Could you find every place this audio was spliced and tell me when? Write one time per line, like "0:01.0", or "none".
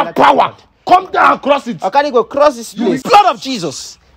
0:03.0